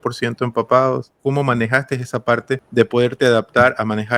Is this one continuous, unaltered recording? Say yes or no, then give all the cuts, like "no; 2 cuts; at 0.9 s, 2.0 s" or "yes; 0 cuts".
no; 2 cuts; at 1.1 s, 2.7 s